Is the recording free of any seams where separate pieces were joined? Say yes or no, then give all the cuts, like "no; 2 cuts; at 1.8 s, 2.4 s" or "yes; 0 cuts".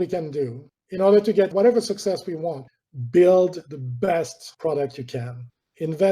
no; 1 cut; at 2.7 s